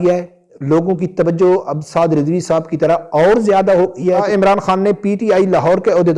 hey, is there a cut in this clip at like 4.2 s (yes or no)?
yes